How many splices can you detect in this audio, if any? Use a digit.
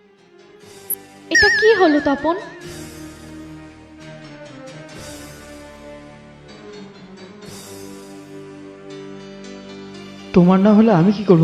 1